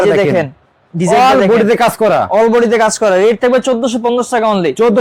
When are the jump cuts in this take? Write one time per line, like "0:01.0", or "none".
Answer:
none

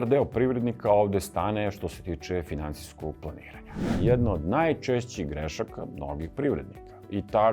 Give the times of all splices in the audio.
0:04.0

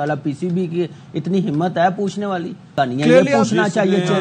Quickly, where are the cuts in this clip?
0:02.7

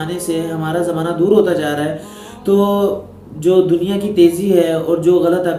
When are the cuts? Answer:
none

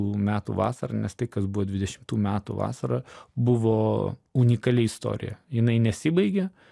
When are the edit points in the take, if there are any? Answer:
0:03.2
0:04.2

